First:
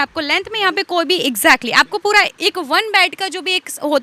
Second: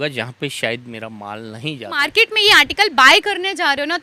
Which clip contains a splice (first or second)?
second